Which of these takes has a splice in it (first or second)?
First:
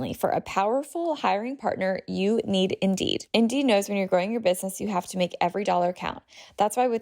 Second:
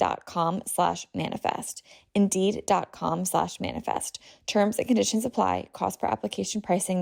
first